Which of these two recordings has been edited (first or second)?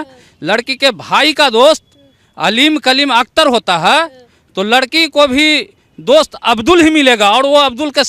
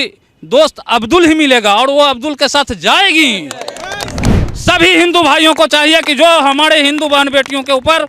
second